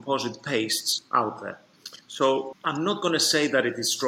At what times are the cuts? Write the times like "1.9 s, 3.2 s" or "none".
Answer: 2.5 s